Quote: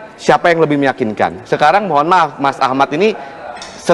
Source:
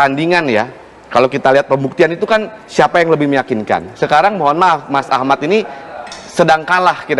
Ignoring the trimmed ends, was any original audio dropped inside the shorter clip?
no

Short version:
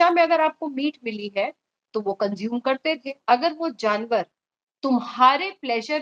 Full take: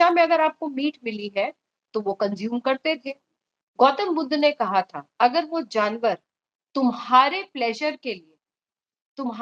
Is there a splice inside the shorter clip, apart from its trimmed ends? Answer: yes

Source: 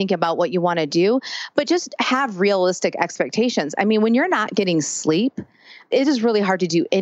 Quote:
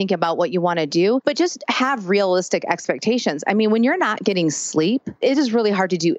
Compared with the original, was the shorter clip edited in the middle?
yes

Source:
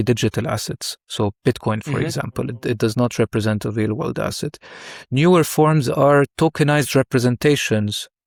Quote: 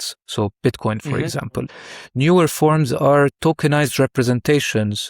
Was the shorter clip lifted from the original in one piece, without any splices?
no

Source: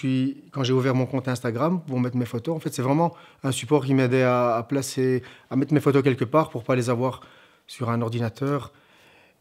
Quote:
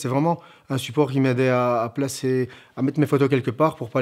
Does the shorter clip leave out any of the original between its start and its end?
no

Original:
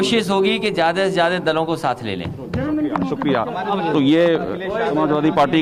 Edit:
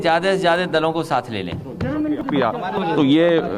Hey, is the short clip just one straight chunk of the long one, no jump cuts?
no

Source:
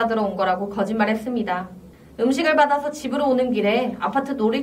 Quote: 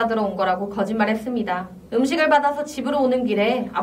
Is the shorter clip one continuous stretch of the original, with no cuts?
no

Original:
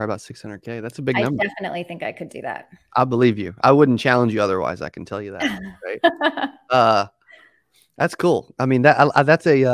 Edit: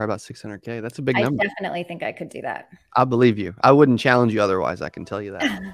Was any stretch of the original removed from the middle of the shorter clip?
no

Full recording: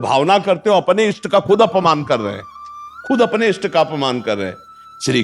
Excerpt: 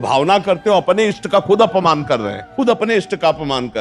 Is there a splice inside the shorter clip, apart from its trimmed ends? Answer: yes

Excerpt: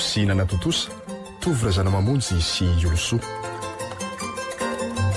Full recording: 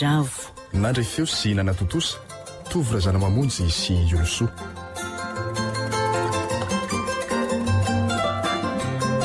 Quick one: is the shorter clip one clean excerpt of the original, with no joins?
no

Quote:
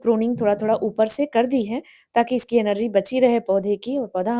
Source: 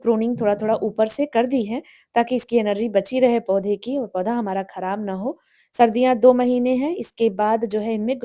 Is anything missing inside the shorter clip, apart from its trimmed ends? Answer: no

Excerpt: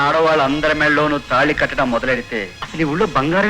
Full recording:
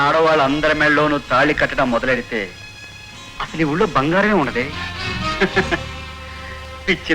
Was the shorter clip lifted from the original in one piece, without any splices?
no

